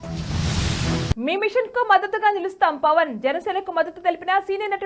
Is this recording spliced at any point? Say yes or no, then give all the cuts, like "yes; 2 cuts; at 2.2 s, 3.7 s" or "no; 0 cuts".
no; 0 cuts